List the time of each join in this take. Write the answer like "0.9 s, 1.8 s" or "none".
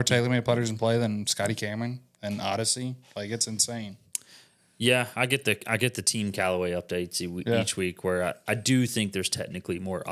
none